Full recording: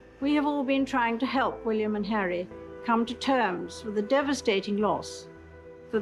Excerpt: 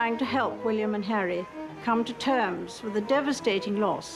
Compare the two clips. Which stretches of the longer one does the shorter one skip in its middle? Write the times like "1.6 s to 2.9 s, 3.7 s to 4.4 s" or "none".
none

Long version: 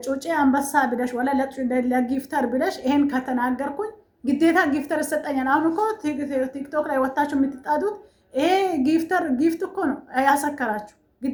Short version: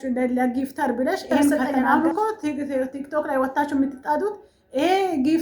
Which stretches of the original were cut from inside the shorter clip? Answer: 3.3 s to 5.3 s

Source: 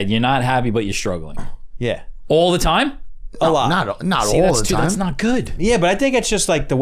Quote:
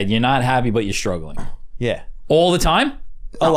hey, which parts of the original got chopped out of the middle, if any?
none

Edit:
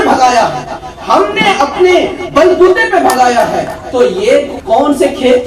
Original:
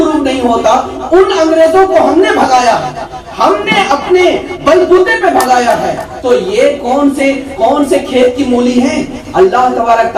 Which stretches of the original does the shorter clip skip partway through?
6.8 s to 7.4 s

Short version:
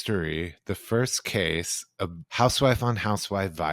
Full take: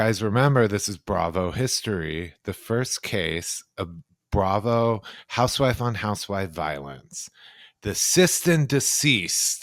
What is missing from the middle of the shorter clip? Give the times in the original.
4.0 s to 5.2 s

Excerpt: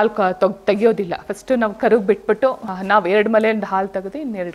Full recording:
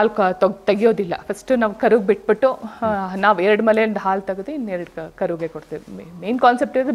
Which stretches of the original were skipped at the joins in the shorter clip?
2.7 s to 3.0 s

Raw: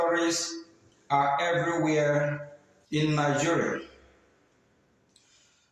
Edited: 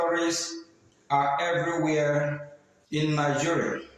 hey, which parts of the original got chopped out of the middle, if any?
none

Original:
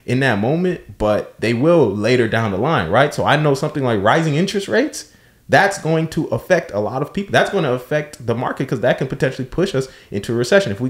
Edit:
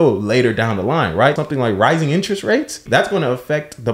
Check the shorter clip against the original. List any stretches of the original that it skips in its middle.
3.1 s to 3.6 s, 5.0 s to 7.2 s

